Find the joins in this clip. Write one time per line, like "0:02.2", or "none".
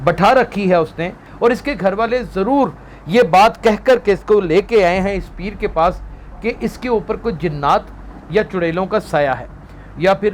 0:01.2